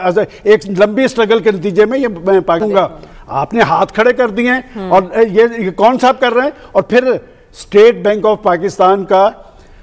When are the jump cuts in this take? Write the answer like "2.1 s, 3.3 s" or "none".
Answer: 2.8 s